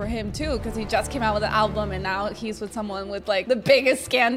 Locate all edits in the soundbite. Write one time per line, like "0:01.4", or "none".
none